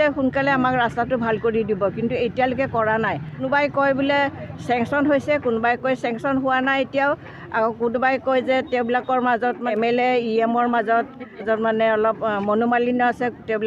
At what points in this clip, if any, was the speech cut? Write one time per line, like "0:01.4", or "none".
0:03.4
0:09.7
0:11.4